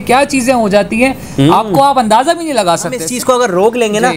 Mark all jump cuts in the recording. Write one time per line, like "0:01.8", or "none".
0:03.1